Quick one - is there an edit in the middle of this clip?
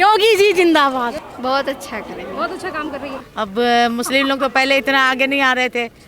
yes; 2 cuts; at 1.2 s, 3.2 s

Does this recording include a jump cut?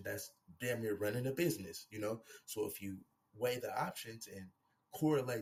no; 0 cuts

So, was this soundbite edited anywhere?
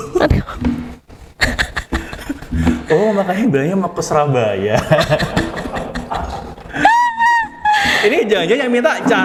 no; 0 cuts

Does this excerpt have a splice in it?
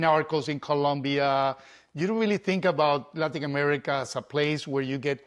no; 0 cuts

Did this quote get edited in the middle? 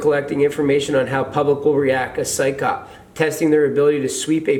no; 0 cuts

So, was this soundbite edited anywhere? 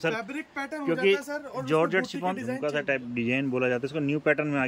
yes; 1 cut; at 2.5 s

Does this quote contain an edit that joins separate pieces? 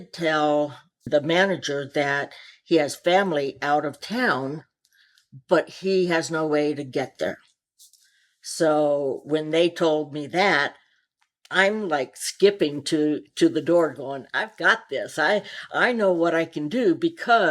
yes; 1 cut; at 1.0 s

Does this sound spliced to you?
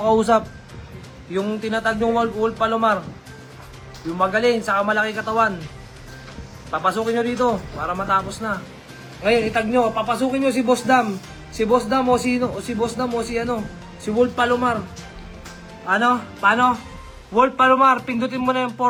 no; 0 cuts

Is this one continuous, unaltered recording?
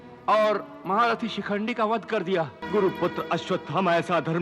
no; 1 cut; at 2.6 s

